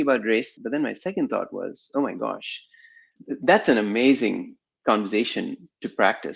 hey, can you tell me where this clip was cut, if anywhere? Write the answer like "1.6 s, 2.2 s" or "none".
3.1 s